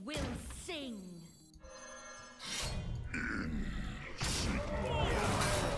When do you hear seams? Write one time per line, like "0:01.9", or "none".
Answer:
0:01.4
0:03.8